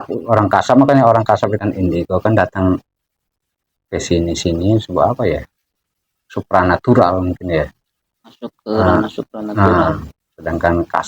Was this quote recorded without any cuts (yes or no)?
no